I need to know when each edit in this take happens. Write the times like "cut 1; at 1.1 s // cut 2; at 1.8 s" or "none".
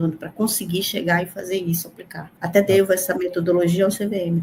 cut 1; at 2.3 s

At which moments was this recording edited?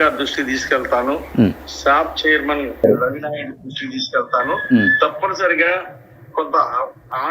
none

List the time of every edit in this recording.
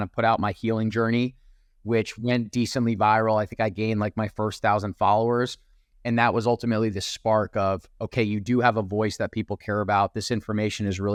none

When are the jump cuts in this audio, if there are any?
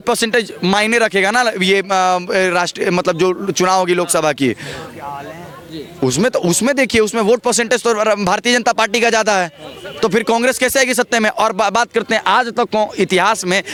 none

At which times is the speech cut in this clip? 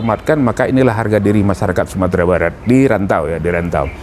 none

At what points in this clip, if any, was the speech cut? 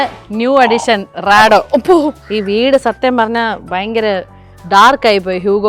cut 1; at 2.2 s

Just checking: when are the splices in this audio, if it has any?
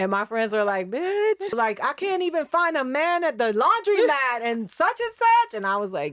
cut 1; at 1.5 s

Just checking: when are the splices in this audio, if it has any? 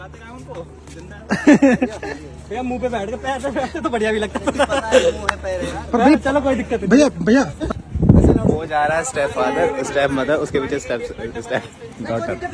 cut 1; at 7.8 s

